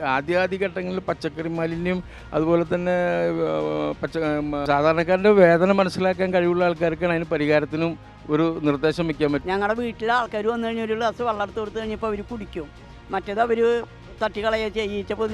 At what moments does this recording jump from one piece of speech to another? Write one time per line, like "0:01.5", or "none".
0:04.6
0:09.4